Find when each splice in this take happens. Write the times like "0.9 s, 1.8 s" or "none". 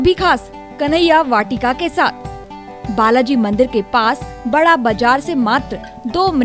2.4 s